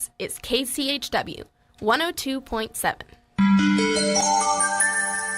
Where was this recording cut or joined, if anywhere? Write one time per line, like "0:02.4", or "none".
0:04.2